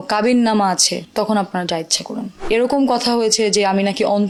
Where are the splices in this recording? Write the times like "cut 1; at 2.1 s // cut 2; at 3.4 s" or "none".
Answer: none

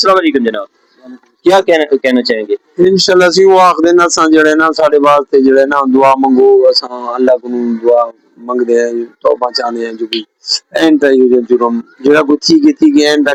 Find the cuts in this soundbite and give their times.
none

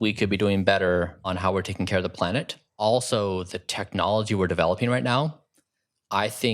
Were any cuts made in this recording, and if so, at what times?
cut 1; at 1.3 s // cut 2; at 2.6 s

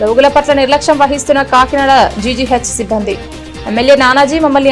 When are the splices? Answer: none

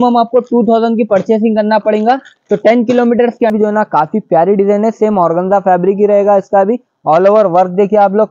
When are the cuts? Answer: cut 1; at 3.5 s

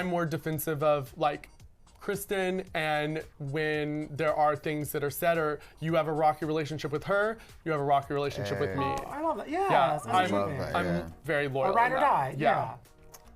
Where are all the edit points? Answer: none

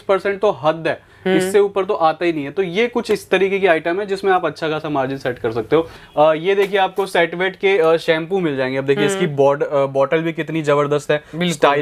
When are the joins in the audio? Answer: cut 1; at 6.0 s

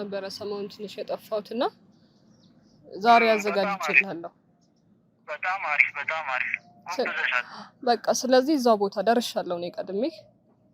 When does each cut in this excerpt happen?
none

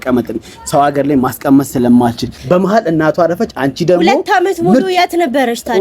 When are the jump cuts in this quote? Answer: cut 1; at 2.4 s

